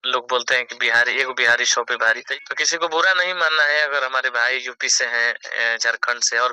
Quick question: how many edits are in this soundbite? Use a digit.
1